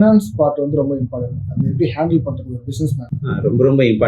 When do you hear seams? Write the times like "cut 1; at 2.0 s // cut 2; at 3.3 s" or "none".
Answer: cut 1; at 3.1 s